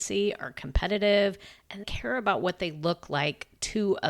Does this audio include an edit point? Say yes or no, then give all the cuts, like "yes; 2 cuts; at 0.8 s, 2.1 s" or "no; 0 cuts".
yes; 1 cut; at 1.9 s